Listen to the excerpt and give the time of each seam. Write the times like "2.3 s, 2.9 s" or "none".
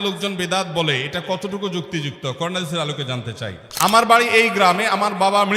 3.6 s